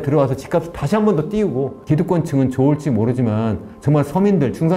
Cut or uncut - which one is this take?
cut